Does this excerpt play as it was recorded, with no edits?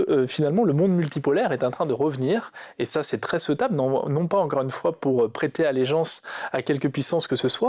yes; 0 cuts

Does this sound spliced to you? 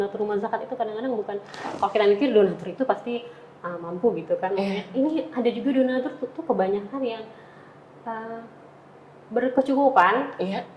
no; 0 cuts

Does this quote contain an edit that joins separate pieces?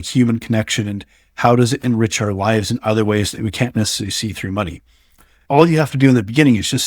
yes; 1 cut; at 5.4 s

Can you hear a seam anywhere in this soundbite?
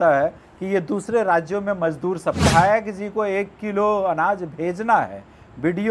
yes; 1 cut; at 2.4 s

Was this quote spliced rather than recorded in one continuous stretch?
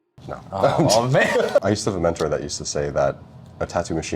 yes; 1 cut; at 1.6 s

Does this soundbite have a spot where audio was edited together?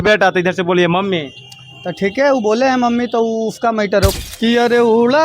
yes; 1 cut; at 4.1 s

